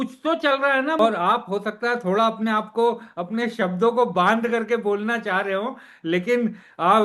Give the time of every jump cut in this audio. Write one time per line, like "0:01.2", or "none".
0:01.0